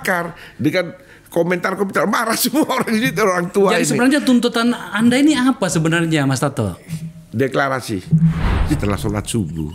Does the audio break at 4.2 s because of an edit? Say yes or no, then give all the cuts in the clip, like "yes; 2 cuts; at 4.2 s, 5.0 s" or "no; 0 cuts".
no; 1 cut; at 8.5 s